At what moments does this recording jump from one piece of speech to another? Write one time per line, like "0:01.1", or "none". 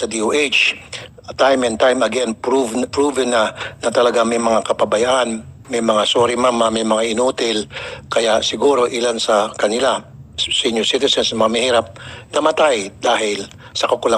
none